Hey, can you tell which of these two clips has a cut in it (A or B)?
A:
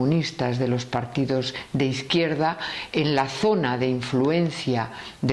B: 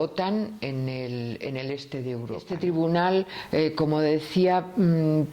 B